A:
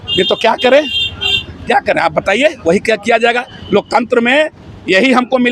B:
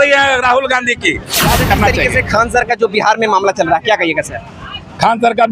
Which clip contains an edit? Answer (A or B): B